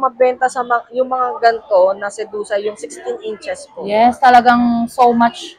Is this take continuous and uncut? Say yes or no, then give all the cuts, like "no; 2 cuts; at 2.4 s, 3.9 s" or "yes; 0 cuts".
yes; 0 cuts